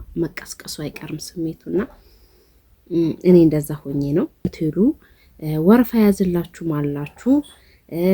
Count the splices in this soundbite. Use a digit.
1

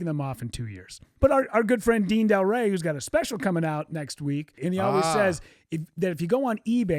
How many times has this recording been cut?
2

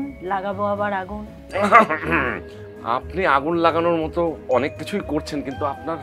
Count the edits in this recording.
0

